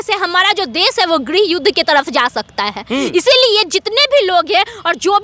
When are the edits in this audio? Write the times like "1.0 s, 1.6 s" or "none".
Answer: none